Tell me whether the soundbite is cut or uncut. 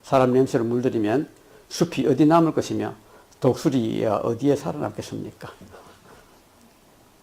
cut